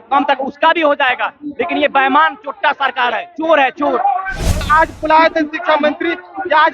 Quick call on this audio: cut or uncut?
cut